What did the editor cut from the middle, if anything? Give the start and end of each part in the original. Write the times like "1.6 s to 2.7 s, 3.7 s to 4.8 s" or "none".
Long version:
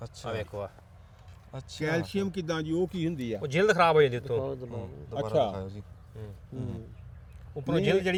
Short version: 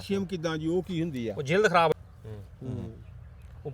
4.0 s to 5.8 s